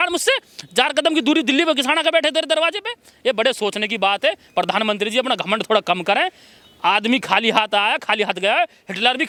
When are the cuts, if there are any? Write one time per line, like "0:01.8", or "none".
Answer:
none